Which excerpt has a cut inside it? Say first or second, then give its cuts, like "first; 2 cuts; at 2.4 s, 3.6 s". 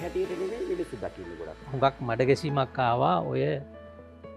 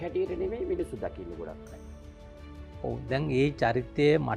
first; 1 cut; at 1.7 s